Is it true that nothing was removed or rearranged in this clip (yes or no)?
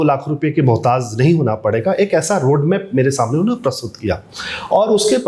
yes